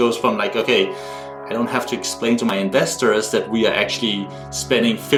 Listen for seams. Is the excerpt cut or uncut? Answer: uncut